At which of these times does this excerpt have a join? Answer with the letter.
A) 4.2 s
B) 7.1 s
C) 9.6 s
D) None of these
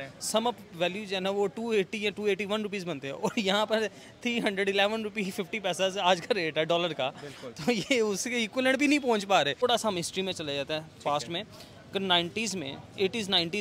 C